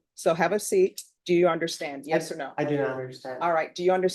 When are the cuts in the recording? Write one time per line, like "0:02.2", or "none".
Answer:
0:01.1